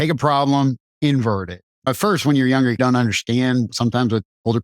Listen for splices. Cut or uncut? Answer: cut